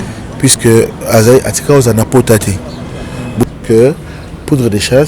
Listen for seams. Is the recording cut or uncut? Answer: cut